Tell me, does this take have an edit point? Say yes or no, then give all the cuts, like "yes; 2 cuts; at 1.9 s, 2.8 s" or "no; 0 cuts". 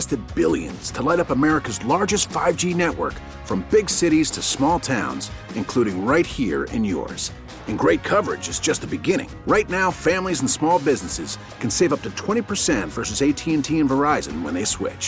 no; 0 cuts